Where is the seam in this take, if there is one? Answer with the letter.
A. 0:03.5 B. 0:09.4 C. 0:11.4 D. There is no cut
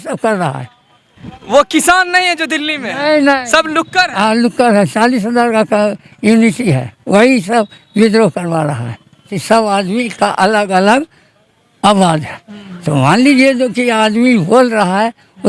B